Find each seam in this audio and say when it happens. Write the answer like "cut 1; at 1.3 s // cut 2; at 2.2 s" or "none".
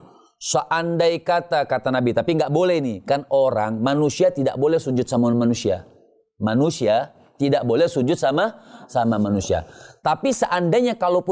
none